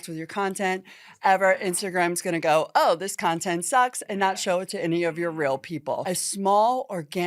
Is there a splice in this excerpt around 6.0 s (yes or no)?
yes